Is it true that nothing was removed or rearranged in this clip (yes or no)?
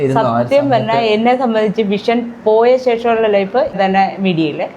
no